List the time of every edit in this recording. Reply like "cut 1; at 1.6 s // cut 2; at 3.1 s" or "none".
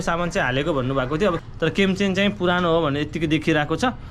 cut 1; at 1.5 s